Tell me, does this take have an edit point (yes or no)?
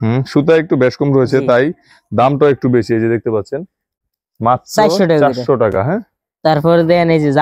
no